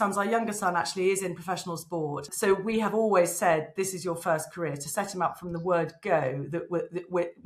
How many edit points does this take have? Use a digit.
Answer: 1